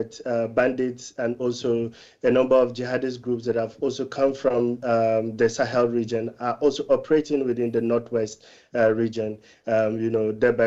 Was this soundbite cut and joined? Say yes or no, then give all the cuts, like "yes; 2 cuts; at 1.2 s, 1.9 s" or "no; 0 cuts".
no; 0 cuts